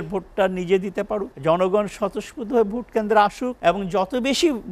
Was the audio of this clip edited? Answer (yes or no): yes